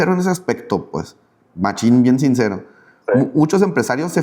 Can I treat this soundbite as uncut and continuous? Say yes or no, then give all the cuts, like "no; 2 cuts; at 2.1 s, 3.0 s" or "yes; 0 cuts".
yes; 0 cuts